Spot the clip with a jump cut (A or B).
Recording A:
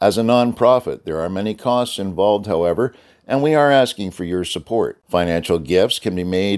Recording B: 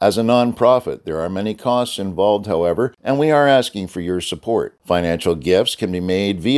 B